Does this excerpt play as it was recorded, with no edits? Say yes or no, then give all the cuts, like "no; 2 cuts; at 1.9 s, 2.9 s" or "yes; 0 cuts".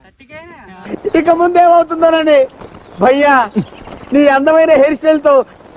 yes; 0 cuts